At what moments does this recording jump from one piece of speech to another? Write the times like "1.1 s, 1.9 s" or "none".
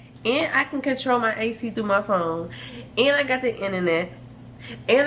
none

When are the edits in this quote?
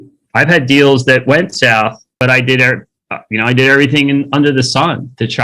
2.1 s

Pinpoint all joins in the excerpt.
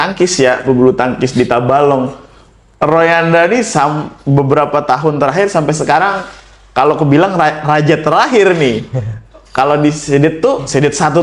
none

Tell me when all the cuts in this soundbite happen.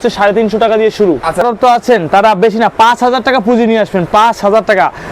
1.4 s

